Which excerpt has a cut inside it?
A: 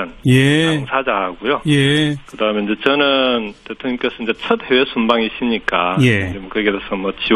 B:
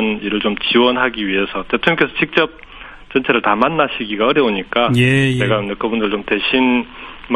B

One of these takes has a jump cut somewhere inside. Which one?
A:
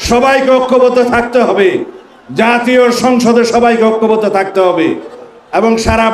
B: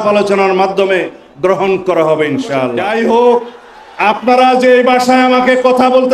B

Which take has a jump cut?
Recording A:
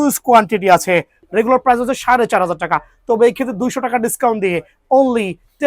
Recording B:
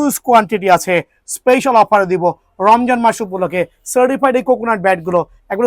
A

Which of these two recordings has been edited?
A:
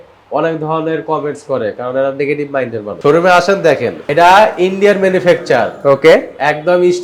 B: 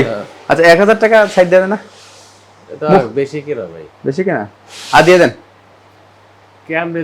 A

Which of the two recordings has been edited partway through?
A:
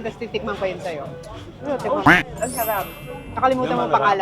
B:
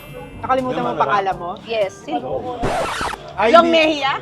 B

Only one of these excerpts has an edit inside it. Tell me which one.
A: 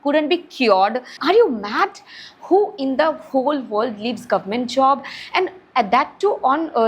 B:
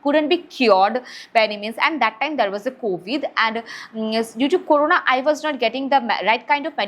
A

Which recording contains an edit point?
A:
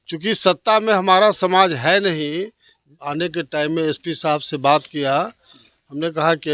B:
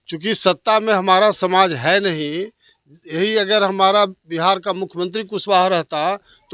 A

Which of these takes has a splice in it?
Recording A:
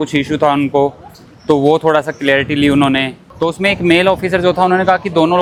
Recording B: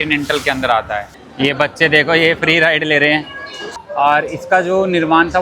B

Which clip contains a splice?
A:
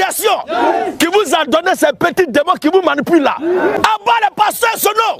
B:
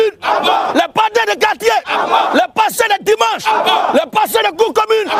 A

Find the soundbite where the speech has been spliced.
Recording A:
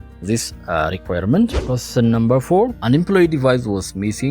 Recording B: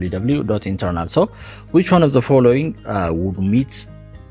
A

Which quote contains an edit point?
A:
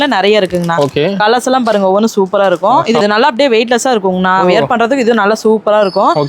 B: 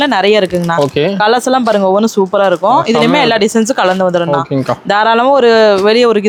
A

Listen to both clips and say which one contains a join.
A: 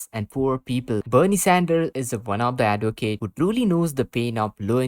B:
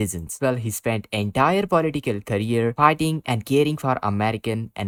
A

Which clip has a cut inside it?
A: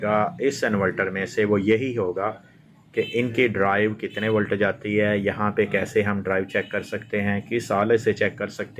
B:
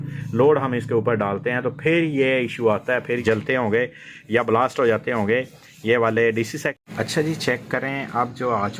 B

